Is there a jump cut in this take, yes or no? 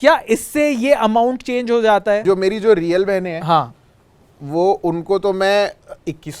yes